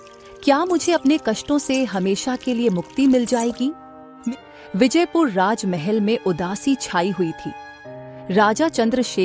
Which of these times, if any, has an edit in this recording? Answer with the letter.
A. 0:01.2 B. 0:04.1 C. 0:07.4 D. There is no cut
B